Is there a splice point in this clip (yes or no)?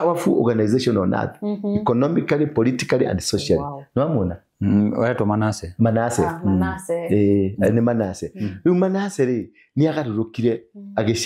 no